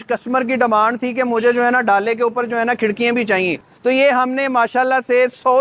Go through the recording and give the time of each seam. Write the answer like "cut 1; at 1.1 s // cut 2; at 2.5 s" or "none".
cut 1; at 3.6 s